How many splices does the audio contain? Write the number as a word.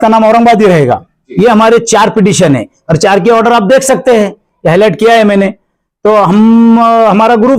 one